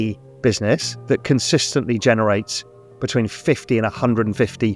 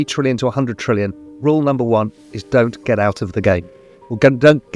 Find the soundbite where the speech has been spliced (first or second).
first